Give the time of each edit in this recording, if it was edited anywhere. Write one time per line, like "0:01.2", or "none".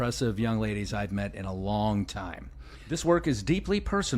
0:03.0